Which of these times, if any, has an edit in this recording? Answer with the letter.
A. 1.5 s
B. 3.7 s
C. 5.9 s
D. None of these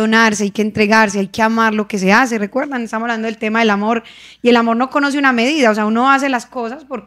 D